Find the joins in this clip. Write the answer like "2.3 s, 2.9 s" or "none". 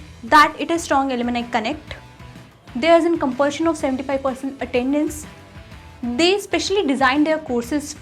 none